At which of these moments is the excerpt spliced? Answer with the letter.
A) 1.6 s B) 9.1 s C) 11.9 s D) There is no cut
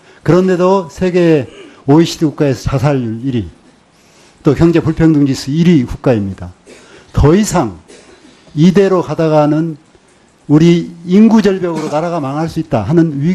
C